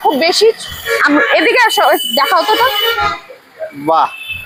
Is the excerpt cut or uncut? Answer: uncut